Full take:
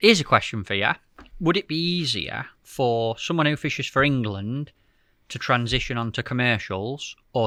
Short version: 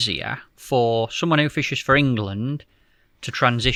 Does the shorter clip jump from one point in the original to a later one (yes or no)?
no